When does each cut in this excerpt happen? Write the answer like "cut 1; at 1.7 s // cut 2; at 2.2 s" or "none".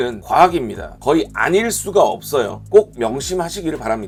none